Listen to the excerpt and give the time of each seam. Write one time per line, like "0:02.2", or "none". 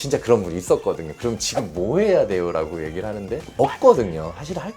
0:03.5